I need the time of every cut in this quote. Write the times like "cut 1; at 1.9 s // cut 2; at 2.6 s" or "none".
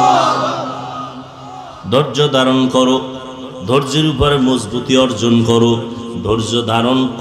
none